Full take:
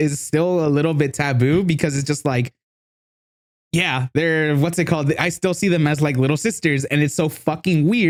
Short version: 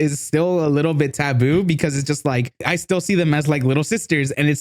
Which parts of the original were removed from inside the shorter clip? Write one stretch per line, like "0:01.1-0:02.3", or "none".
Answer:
0:02.7-0:05.2

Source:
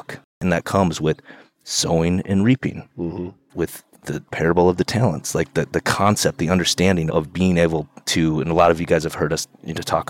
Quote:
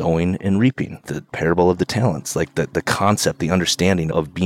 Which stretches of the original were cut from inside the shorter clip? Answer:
0:02.8-0:03.9

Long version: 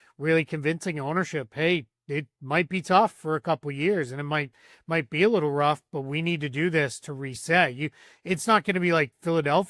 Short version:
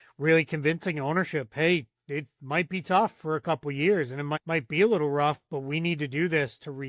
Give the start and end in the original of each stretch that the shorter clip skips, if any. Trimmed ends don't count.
0:04.4-0:04.8

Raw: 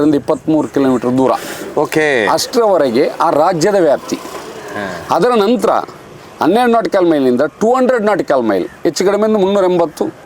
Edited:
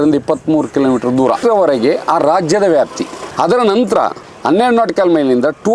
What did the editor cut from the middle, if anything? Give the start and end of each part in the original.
0:01.4-0:02.5
0:04.3-0:04.9
0:06.0-0:06.2

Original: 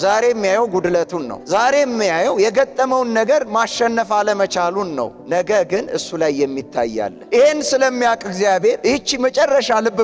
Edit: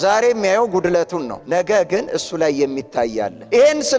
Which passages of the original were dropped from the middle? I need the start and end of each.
0:01.4-0:05.2

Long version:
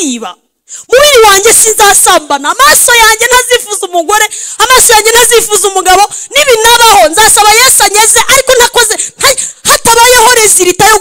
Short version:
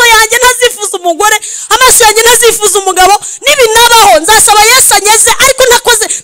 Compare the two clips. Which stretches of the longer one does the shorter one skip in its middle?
none

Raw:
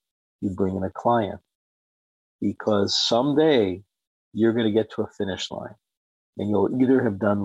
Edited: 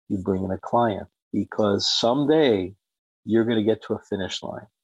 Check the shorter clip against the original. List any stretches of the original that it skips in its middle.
0:01.5-0:02.2

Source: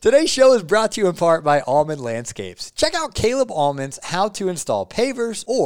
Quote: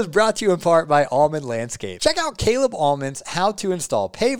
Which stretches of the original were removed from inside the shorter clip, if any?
0:02.4-0:02.6

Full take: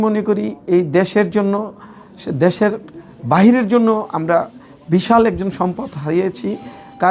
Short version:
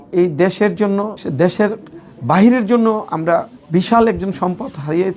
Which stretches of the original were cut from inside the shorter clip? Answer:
0:01.7-0:02.2
0:04.6-0:04.7

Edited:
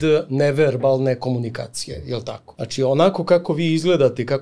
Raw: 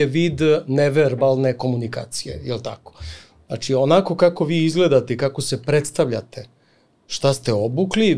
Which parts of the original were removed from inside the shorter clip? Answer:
0:02.8-0:03.4

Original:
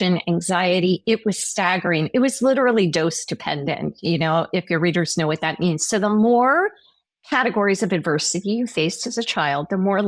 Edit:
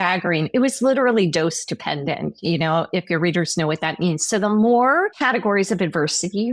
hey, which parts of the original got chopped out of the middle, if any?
0:06.8-0:07.3

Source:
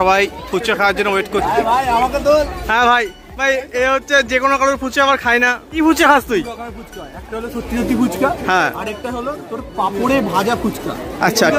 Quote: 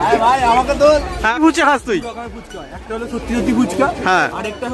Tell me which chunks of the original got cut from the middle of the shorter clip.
0:02.8-0:05.7

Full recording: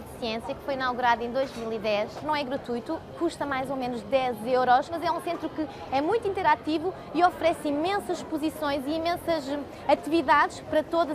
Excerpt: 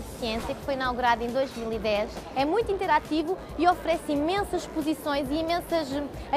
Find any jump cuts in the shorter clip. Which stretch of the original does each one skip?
0:02.2-0:05.7

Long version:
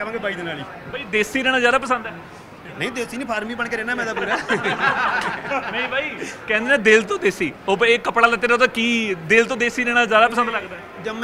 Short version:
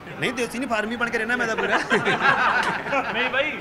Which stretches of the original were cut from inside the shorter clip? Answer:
none

